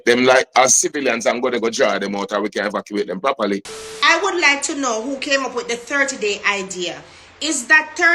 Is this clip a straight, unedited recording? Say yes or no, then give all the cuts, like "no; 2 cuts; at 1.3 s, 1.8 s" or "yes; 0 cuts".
no; 1 cut; at 3.8 s